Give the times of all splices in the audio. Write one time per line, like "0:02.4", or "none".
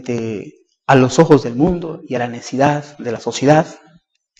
0:01.9